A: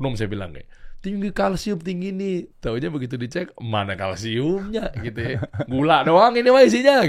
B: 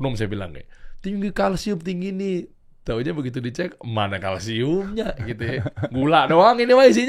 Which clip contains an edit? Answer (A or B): A